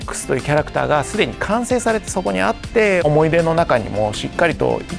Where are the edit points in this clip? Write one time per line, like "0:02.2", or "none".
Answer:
0:03.0

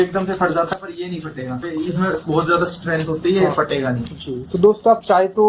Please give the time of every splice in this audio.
0:01.7

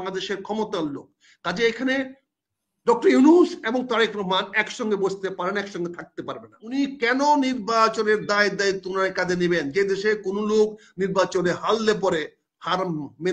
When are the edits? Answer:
0:06.6

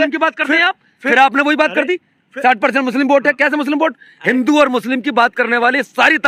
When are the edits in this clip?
none

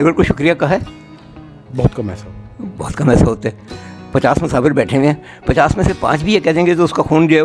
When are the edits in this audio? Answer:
none

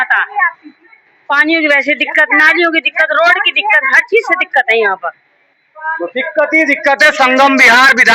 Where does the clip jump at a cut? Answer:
none

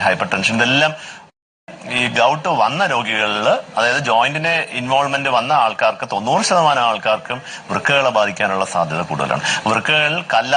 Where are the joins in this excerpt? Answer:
0:01.7

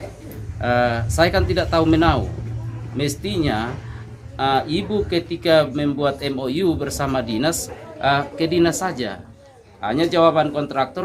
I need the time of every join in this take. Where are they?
none

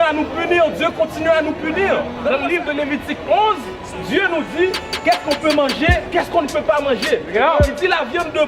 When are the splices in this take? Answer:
0:02.3

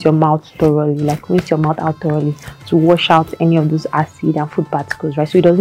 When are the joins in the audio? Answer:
none

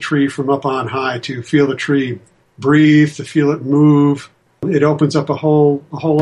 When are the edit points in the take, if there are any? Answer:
0:04.6

